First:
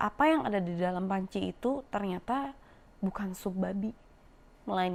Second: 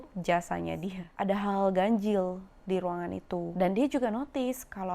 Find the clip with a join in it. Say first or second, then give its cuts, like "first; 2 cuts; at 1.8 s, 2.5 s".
second; 2 cuts; at 1.1 s, 3.5 s